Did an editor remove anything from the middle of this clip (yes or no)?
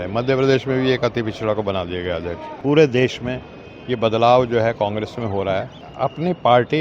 yes